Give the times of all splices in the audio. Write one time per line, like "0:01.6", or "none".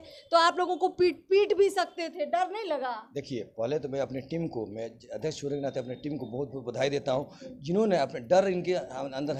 none